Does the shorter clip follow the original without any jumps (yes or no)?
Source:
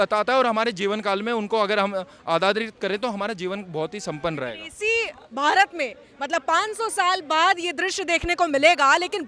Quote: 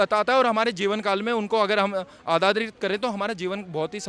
yes